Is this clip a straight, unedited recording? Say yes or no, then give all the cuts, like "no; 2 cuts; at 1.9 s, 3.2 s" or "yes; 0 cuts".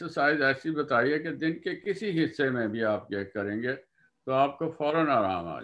yes; 0 cuts